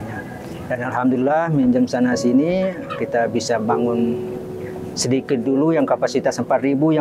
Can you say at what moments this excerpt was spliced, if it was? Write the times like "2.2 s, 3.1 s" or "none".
none